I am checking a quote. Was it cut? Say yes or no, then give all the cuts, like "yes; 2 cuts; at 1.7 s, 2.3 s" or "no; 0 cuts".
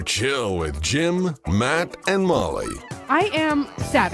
no; 0 cuts